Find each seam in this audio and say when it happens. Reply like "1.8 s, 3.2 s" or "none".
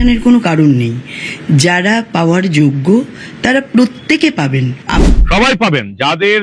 5.0 s